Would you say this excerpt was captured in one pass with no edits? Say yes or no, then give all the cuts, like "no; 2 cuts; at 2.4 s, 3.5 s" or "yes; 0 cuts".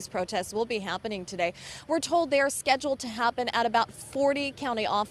yes; 0 cuts